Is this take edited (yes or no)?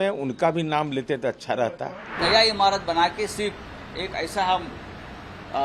yes